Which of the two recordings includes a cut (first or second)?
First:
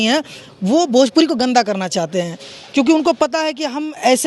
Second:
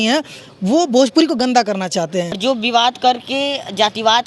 second